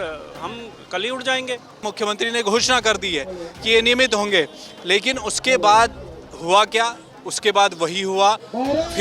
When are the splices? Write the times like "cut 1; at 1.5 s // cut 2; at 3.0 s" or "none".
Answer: cut 1; at 1.8 s

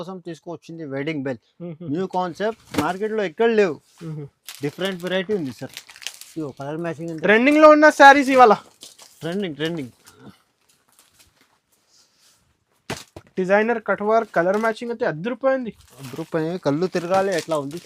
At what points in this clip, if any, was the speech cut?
none

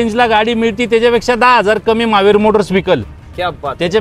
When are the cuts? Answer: none

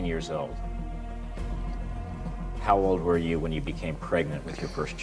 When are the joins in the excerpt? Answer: none

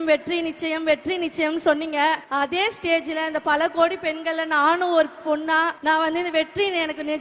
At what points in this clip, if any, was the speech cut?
cut 1; at 2.2 s // cut 2; at 5.8 s

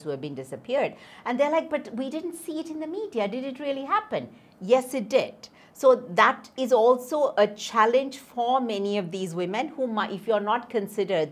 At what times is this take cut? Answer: none

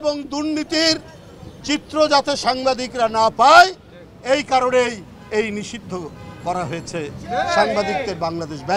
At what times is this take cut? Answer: none

